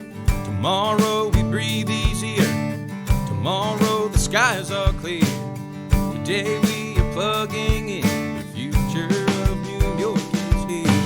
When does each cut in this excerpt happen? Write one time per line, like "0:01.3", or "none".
none